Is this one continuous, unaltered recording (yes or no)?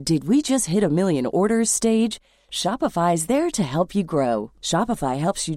yes